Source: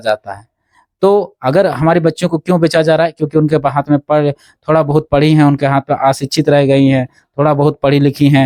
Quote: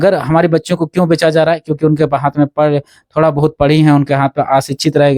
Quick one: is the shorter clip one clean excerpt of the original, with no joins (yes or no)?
yes